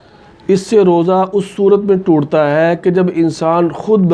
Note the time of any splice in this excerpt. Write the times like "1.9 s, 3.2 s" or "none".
none